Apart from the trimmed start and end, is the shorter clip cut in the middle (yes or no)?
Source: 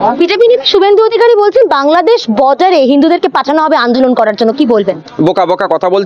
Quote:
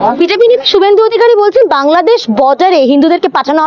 no